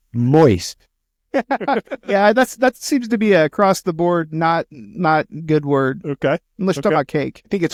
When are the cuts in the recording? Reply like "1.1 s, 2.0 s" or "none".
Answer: none